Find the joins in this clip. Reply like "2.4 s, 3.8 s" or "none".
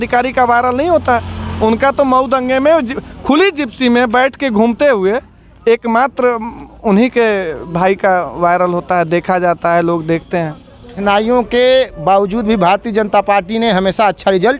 11.0 s